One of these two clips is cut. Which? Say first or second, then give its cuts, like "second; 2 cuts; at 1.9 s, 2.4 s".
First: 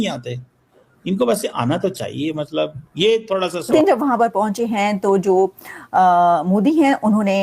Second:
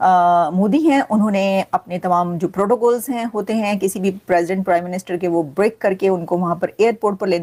first; 1 cut; at 3.7 s